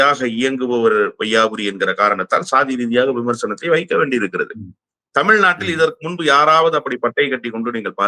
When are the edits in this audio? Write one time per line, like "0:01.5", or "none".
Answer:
none